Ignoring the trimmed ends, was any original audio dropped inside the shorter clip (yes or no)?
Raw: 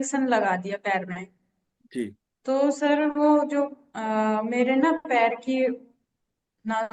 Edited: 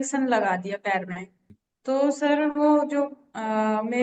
yes